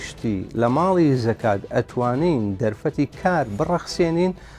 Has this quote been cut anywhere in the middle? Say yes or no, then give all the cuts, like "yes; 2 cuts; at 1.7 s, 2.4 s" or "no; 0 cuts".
no; 0 cuts